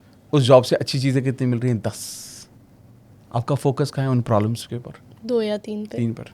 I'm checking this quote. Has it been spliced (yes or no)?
no